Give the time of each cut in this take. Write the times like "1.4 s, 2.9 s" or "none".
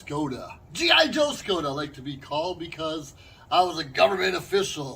none